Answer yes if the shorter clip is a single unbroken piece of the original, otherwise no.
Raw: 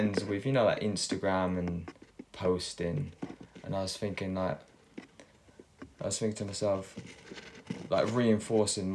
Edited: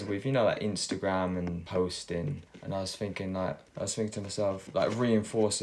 no